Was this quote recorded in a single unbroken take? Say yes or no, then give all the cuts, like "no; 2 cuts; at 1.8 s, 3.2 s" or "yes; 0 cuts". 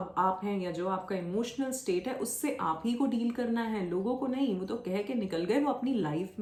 yes; 0 cuts